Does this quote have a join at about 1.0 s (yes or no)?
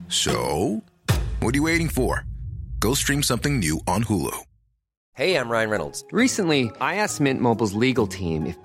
no